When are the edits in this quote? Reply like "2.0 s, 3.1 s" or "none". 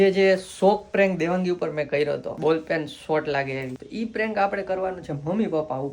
2.3 s, 3.8 s